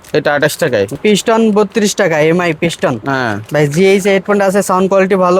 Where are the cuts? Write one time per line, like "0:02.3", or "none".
0:01.0